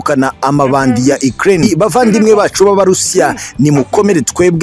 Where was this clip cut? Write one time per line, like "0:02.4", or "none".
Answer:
0:01.7